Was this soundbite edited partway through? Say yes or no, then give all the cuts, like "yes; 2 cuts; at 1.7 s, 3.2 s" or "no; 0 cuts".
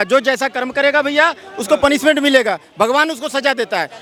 no; 0 cuts